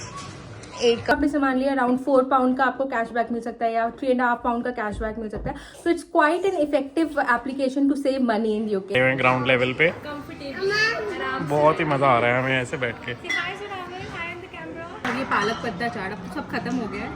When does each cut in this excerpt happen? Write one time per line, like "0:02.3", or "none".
0:01.1
0:08.9
0:15.0